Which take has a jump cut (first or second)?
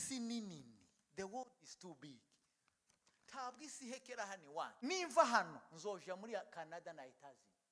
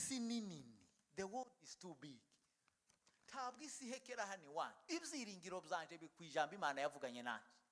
first